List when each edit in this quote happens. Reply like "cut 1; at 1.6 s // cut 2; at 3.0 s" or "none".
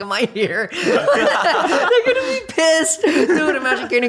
cut 1; at 1.9 s